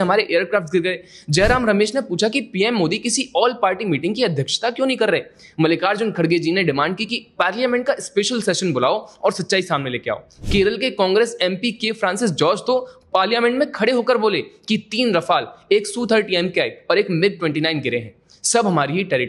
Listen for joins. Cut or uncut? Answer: uncut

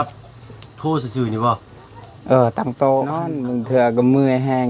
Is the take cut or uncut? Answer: cut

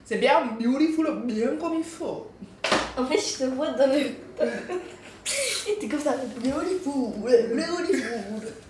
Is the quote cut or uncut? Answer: uncut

